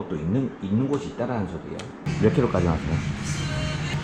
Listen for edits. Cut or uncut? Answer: cut